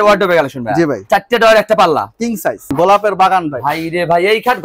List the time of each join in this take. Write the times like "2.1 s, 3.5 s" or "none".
1.0 s, 2.7 s